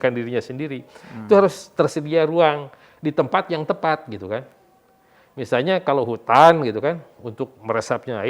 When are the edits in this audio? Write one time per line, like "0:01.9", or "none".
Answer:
none